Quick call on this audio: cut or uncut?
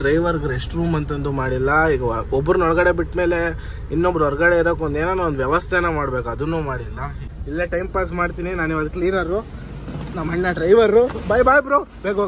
cut